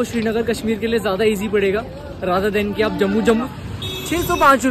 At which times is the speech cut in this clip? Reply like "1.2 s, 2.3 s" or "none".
3.5 s